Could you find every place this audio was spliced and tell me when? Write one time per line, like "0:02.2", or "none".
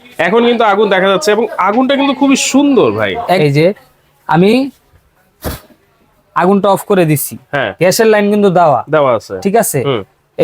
0:03.4

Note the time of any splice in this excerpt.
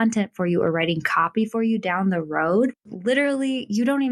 0:02.8

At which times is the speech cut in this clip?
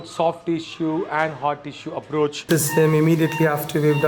0:02.4

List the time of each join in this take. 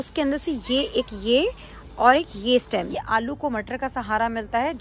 0:02.9

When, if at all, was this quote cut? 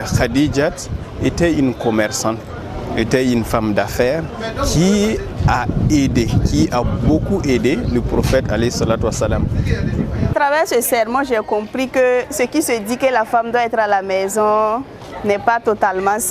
0:10.3

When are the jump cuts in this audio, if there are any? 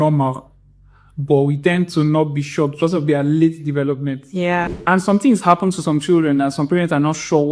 0:04.7

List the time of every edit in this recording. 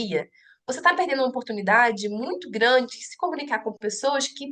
none

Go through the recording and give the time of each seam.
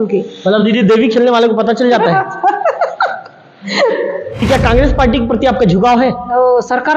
0:04.4

